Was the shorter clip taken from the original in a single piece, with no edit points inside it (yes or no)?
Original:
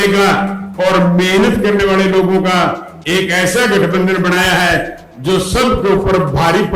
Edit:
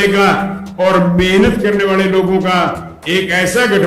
yes